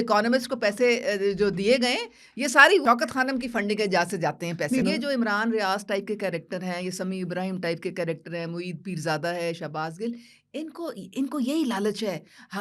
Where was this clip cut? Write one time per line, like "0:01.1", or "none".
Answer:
0:02.8
0:04.8